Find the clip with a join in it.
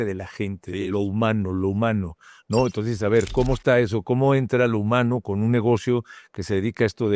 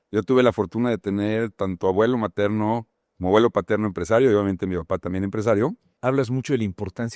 second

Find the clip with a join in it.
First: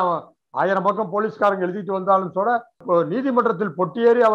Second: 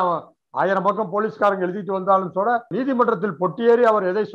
second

